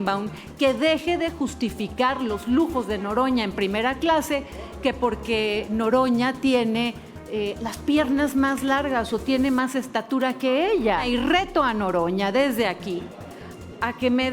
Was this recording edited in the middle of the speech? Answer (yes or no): yes